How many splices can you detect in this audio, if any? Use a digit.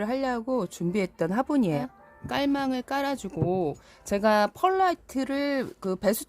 1